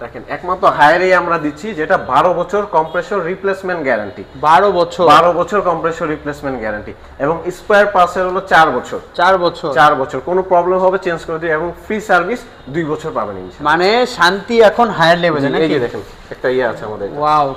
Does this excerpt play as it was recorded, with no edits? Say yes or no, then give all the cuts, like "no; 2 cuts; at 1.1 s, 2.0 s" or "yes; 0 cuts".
yes; 0 cuts